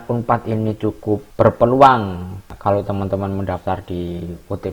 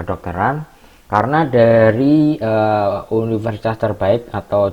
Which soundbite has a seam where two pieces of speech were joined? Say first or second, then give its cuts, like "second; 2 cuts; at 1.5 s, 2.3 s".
first; 2 cuts; at 1.3 s, 2.4 s